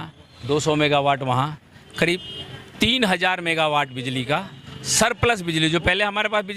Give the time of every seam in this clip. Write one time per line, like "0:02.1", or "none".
none